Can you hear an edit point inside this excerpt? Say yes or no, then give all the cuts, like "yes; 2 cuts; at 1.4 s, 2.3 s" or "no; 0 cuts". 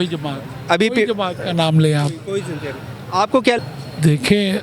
yes; 1 cut; at 3.6 s